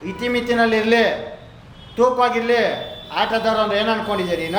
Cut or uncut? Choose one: uncut